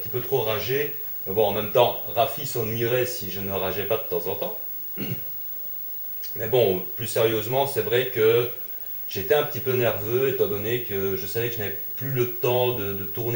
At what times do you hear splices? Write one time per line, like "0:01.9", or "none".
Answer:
0:03.0